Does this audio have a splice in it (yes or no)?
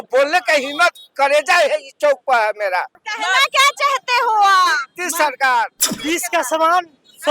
yes